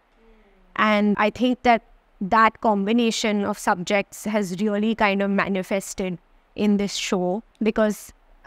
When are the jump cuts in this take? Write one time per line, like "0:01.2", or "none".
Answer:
0:01.2
0:07.5